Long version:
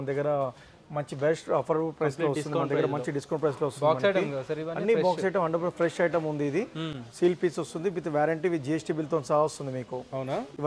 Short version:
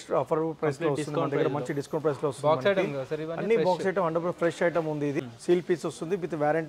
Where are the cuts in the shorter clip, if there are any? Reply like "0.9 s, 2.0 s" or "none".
5.2 s